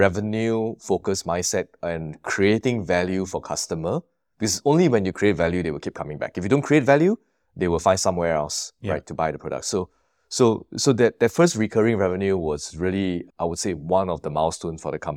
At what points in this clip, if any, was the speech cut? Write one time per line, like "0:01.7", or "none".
none